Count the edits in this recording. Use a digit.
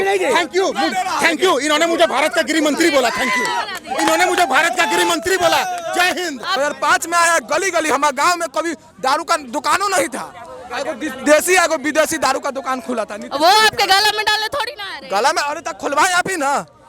1